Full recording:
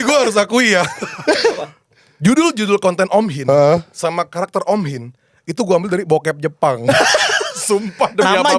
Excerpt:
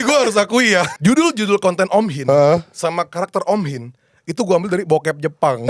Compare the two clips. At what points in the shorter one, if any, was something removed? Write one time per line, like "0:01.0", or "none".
0:00.9